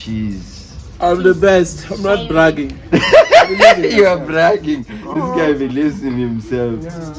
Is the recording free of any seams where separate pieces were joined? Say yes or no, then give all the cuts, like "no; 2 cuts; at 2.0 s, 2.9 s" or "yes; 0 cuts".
yes; 0 cuts